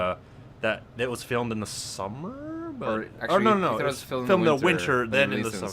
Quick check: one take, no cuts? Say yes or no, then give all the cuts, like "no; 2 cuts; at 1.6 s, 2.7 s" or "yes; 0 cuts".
no; 1 cut; at 4.0 s